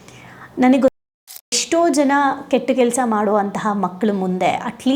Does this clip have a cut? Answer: yes; 1 cut; at 1.0 s

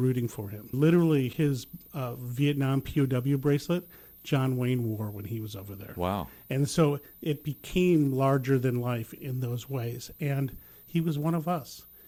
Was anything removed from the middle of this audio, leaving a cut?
no; 0 cuts

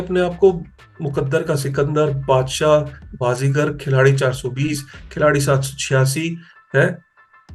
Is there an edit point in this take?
no; 0 cuts

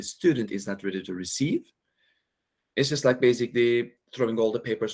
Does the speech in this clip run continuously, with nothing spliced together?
yes; 0 cuts

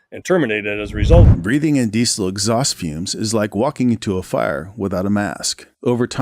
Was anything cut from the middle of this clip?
yes; 1 cut; at 1.2 s

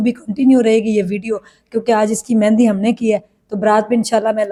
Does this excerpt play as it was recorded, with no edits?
yes; 0 cuts

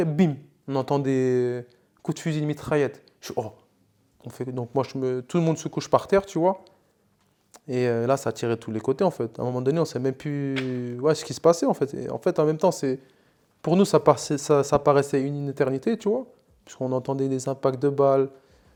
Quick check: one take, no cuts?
yes; 0 cuts

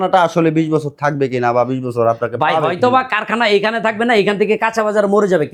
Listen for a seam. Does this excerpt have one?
no; 0 cuts

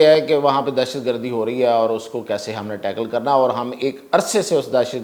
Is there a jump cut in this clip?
no; 0 cuts

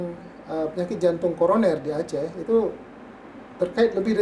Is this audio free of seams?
yes; 0 cuts

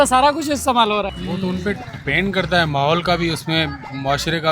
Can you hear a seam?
yes; 1 cut; at 1.2 s

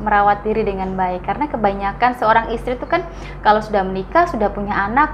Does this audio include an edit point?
no; 0 cuts

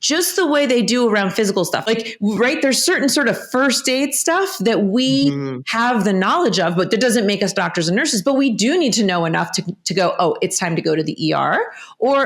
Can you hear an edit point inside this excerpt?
yes; 1 cut; at 1.8 s

